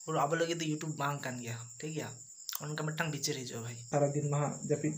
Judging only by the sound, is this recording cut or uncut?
cut